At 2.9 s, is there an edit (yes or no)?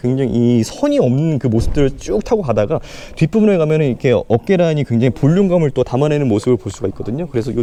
no